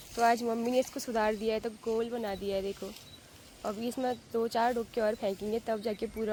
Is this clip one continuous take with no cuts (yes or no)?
yes